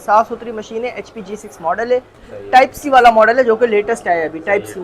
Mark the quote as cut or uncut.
uncut